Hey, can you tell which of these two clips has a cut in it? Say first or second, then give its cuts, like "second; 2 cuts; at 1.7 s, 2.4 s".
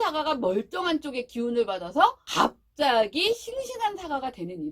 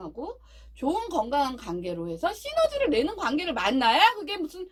first; 1 cut; at 2.2 s